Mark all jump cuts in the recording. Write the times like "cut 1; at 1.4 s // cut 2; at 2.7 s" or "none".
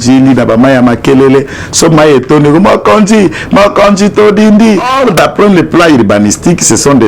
cut 1; at 4.9 s